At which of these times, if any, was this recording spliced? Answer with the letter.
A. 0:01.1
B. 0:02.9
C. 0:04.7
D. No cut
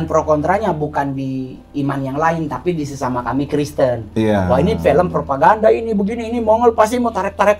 D